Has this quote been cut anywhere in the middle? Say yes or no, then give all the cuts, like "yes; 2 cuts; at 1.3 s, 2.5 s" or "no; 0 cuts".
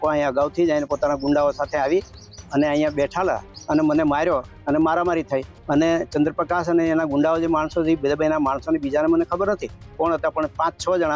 yes; 2 cuts; at 3.5 s, 5.5 s